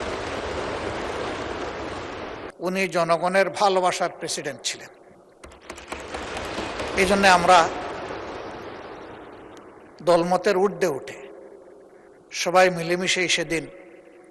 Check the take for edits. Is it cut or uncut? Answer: cut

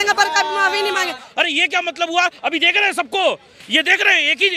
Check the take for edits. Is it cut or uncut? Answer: cut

